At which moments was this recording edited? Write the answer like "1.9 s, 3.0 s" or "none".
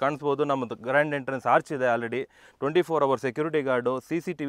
none

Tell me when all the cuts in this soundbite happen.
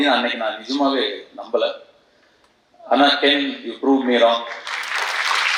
none

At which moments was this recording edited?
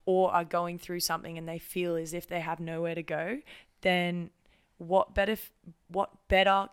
none

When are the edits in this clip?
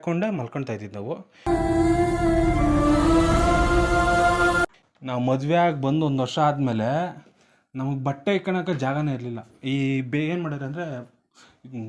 4.8 s

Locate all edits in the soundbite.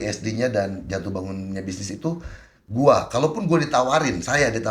2.5 s

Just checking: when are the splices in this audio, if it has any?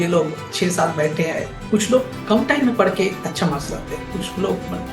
1.6 s

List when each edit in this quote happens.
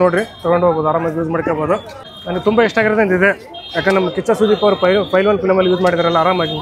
none

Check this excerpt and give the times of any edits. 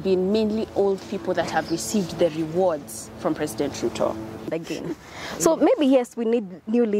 4.5 s

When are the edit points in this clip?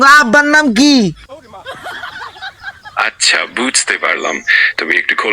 1.2 s, 2.6 s

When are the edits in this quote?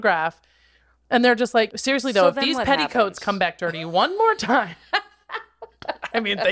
1.7 s

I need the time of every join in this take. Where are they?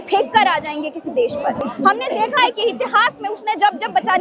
1.6 s

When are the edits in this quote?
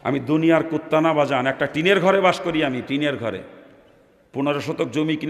none

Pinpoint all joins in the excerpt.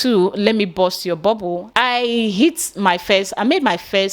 1.6 s

